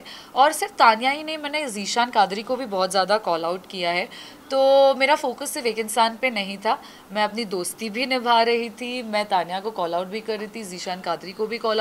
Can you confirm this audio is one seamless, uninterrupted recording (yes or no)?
yes